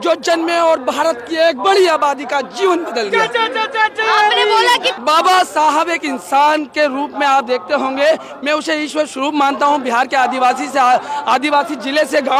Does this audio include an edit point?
yes; 1 cut; at 4.9 s

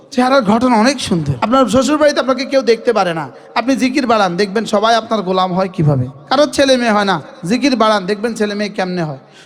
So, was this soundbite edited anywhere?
yes; 2 cuts; at 1.3 s, 6.1 s

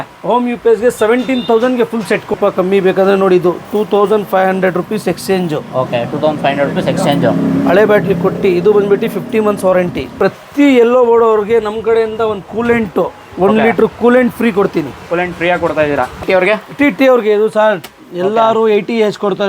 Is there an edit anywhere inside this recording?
yes; 3 cuts; at 2.4 s, 10.2 s, 16.2 s

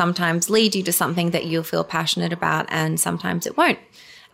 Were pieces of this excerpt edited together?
no; 0 cuts

